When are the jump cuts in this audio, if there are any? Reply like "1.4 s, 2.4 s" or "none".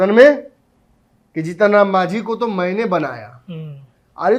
none